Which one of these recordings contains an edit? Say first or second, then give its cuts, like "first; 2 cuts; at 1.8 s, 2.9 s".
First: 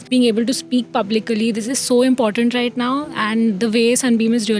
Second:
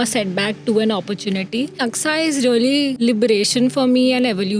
second; 2 cuts; at 1.8 s, 2.9 s